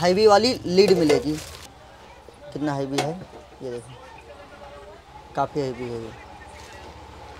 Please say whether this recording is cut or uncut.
cut